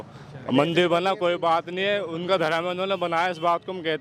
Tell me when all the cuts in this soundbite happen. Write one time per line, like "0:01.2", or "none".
none

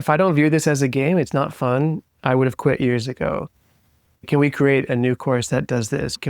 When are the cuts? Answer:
0:04.3

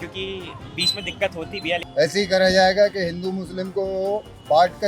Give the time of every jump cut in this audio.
0:01.9

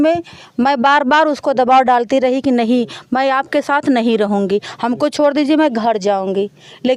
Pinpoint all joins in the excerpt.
none

